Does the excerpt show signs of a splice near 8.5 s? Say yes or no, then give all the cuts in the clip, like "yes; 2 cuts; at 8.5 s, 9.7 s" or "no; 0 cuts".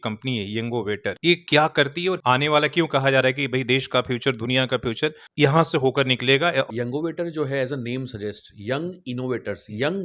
no; 4 cuts; at 1.3 s, 2.2 s, 5.2 s, 6.7 s